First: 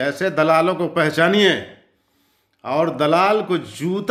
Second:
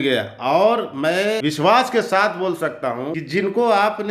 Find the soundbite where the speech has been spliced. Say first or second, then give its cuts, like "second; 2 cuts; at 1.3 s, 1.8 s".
second; 2 cuts; at 1.4 s, 3.2 s